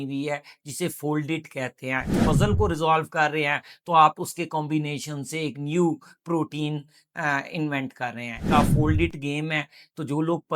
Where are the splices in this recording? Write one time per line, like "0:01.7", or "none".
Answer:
0:02.2
0:08.4